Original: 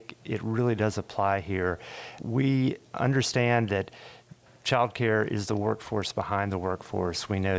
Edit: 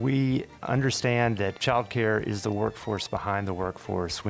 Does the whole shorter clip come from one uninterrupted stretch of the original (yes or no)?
no